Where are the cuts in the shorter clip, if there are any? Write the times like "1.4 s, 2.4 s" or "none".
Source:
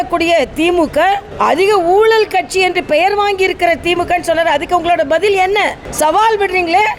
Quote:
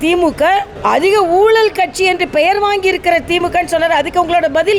none